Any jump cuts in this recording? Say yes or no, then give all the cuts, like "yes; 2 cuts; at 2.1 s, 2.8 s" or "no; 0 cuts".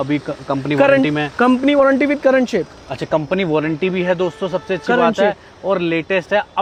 no; 0 cuts